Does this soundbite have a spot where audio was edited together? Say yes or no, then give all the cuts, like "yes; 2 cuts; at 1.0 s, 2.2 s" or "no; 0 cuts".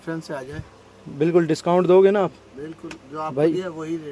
no; 0 cuts